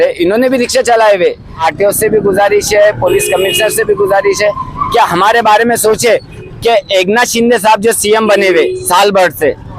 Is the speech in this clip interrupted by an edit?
yes; 2 cuts; at 1.6 s, 6.3 s

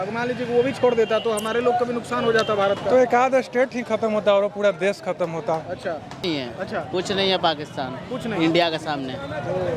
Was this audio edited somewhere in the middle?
yes; 1 cut; at 6.2 s

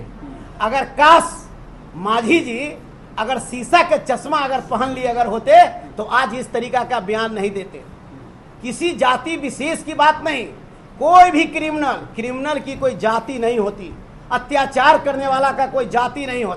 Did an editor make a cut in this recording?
no; 0 cuts

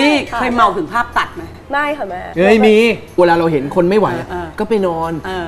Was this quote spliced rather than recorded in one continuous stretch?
yes; 2 cuts; at 1.6 s, 3.2 s

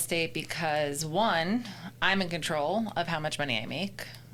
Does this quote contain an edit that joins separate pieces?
no; 0 cuts

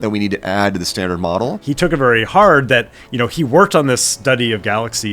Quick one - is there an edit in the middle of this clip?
yes; 1 cut; at 1.6 s

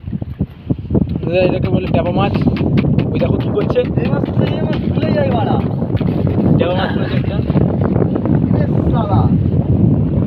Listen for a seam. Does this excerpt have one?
no; 0 cuts

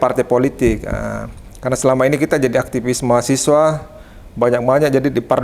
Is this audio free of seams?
yes; 0 cuts

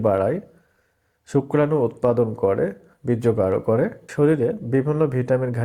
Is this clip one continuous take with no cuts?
no; 1 cut; at 4.0 s

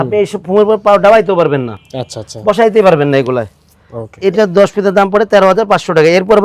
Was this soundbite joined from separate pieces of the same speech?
no; 0 cuts

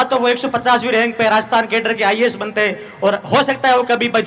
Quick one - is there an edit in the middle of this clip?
no; 0 cuts

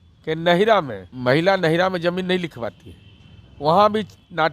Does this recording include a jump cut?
yes; 1 cut; at 1.0 s

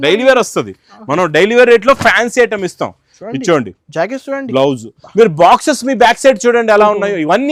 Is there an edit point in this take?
no; 0 cuts

